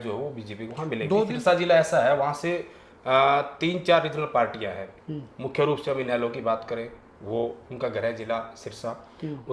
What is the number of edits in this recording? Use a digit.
1